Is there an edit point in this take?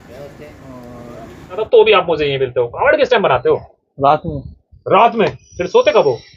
yes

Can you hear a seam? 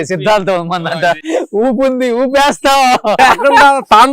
yes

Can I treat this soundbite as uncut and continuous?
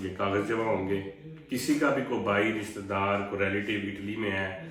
yes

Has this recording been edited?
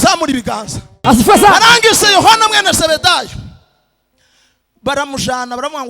yes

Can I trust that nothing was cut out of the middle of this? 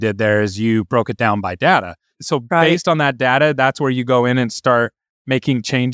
no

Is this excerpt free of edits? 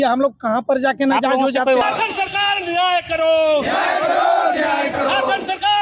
no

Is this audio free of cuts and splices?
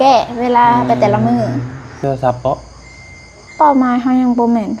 no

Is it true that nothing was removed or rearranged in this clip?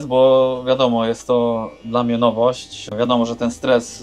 yes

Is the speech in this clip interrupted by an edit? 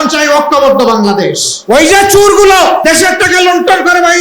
yes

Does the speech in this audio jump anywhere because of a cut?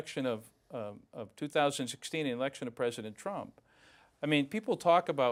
no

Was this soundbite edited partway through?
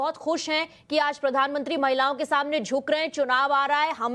yes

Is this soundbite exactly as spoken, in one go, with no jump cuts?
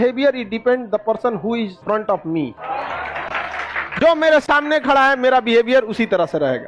yes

